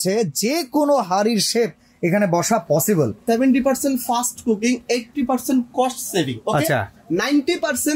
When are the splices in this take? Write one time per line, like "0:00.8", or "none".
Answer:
0:03.2